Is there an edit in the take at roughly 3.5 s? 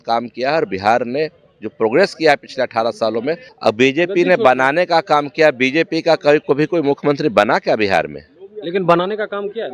yes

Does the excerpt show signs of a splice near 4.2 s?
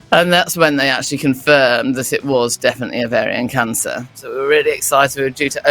yes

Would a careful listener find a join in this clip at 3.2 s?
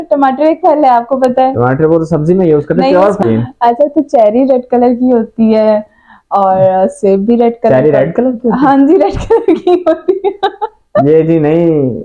yes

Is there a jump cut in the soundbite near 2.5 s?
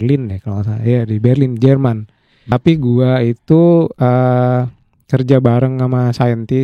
yes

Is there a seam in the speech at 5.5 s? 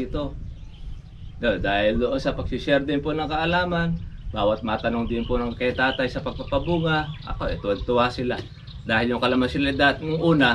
no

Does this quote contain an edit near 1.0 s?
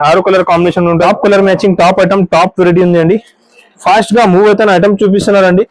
yes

